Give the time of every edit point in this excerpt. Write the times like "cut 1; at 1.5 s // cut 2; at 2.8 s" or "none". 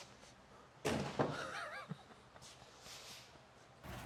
none